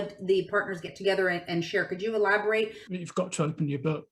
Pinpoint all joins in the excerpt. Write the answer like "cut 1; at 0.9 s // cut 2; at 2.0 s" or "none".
cut 1; at 2.8 s